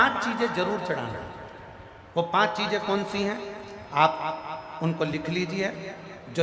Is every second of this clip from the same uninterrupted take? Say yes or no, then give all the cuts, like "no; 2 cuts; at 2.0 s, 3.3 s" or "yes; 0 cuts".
yes; 0 cuts